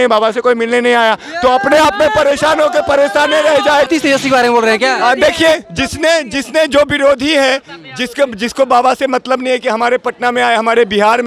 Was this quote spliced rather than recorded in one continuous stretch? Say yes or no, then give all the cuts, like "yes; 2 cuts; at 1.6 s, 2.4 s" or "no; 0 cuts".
yes; 1 cut; at 3.9 s